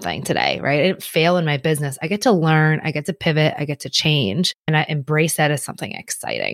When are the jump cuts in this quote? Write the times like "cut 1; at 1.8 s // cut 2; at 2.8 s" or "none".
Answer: cut 1; at 4.7 s